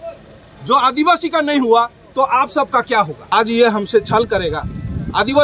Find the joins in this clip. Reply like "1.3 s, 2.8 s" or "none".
3.2 s

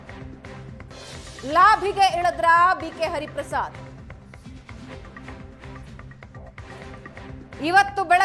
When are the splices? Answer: none

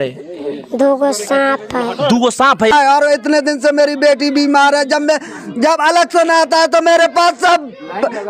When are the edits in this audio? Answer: 2.7 s

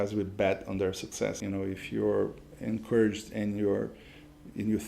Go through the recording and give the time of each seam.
1.4 s

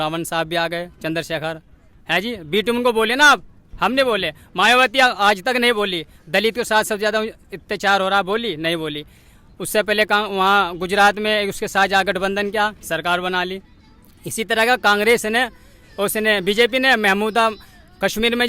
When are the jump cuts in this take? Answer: none

